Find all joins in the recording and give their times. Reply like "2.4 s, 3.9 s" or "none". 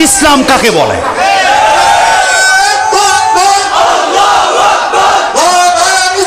none